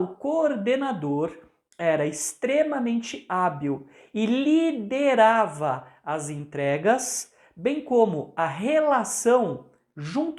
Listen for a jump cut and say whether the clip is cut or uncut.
uncut